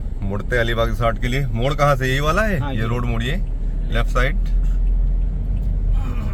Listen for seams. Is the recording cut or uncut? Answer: uncut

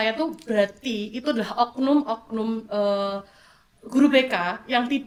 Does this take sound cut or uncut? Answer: uncut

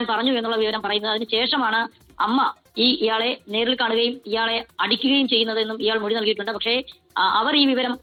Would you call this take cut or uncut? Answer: uncut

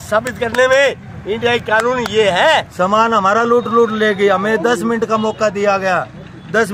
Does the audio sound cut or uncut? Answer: cut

